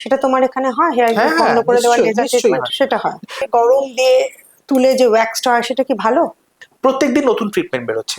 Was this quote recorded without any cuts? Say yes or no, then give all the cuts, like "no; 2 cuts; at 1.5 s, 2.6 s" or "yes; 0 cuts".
no; 2 cuts; at 3.4 s, 6.7 s